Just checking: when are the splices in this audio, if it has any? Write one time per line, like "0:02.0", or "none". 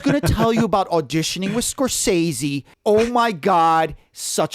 0:02.7